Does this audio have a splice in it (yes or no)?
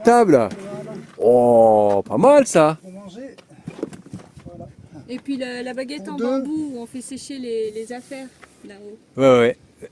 no